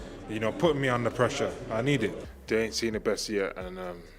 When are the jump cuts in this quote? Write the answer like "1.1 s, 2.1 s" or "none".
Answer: 2.3 s